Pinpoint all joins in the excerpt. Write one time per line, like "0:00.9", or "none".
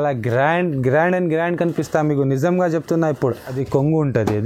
0:03.5